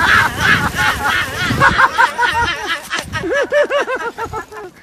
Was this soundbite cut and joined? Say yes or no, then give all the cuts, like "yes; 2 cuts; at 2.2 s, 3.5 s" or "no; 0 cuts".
no; 0 cuts